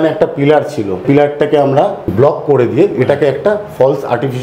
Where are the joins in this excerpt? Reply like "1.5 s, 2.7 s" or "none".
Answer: 1.0 s, 2.0 s